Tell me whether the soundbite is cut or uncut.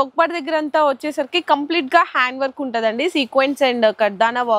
uncut